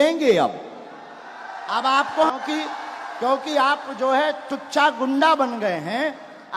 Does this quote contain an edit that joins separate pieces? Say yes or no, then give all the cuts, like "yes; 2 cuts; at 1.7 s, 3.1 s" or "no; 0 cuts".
yes; 1 cut; at 2.3 s